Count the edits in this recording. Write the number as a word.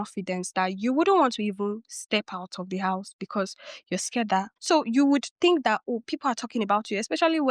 one